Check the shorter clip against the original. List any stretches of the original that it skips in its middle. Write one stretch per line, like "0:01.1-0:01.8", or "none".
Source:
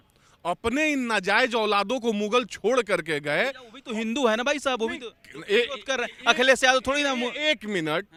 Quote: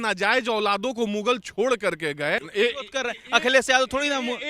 0:03.5-0:05.4